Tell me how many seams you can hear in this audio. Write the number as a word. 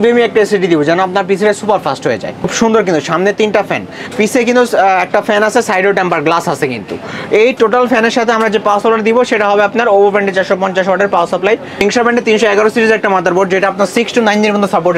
two